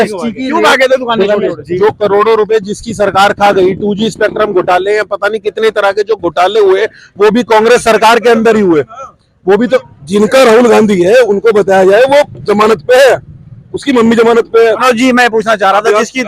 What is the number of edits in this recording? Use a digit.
3